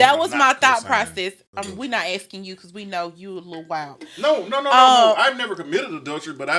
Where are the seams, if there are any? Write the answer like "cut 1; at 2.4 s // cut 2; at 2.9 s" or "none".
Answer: none